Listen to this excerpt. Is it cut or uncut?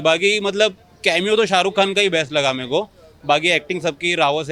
uncut